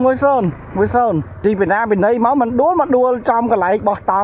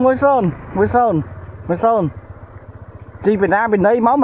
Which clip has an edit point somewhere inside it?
first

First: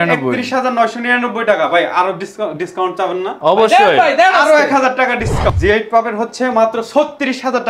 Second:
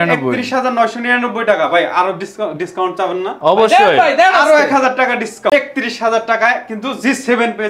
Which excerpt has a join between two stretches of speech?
first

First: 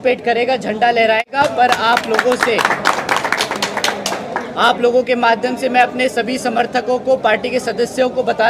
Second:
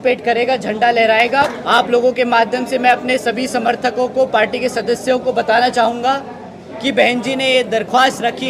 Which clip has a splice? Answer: second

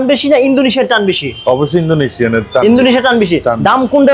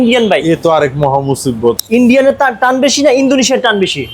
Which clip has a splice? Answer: second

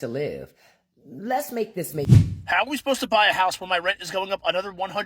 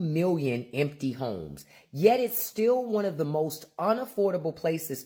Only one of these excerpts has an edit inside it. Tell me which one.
first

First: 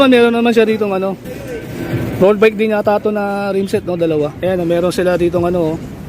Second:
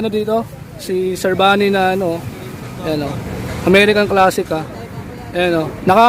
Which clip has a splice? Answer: first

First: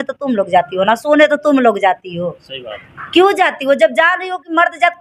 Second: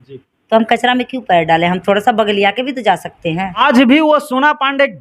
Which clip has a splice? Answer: second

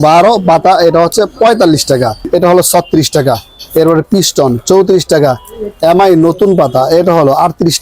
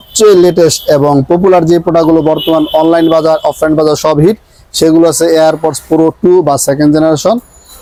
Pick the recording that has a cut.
first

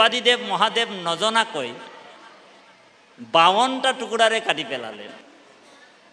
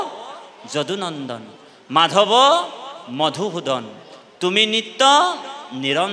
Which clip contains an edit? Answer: first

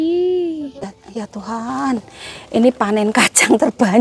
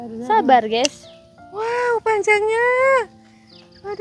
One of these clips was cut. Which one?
first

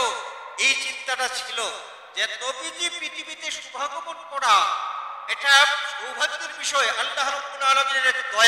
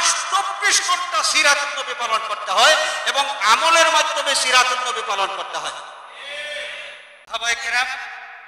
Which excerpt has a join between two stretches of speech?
second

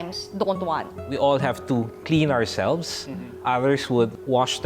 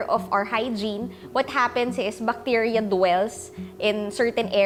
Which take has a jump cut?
first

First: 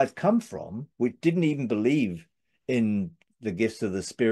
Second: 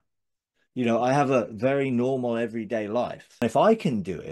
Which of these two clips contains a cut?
second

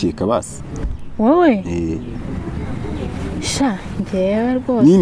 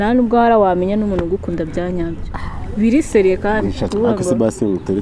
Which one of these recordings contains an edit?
second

